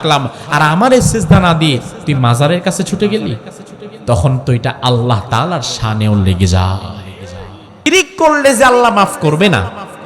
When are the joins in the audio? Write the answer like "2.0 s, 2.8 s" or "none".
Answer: 7.9 s